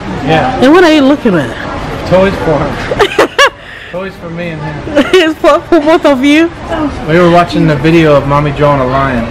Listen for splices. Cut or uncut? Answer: cut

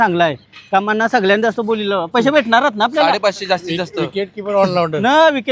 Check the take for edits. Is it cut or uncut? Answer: uncut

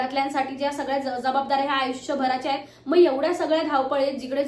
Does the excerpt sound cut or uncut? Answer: cut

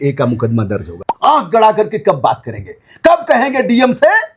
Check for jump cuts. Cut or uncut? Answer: cut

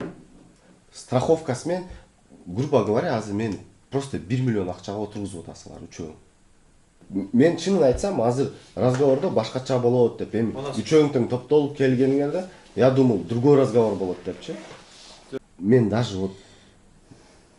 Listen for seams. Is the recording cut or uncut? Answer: cut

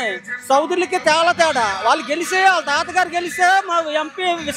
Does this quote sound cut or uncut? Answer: uncut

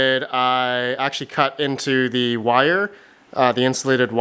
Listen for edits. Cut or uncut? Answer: uncut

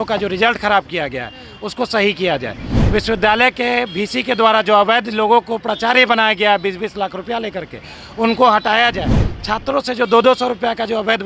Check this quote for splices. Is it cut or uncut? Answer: uncut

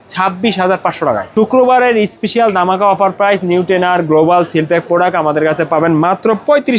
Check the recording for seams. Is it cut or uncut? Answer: cut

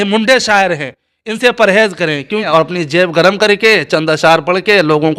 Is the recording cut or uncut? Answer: cut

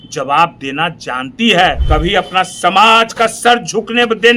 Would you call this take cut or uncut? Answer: cut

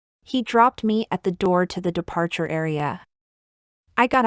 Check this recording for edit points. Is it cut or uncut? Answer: cut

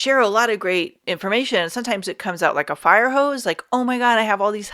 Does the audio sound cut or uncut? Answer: cut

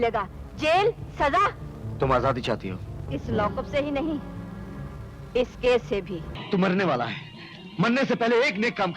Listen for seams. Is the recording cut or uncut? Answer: cut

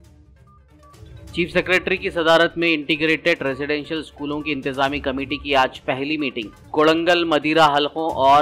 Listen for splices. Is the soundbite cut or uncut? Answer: uncut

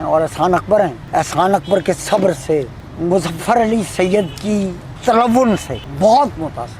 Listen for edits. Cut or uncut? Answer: cut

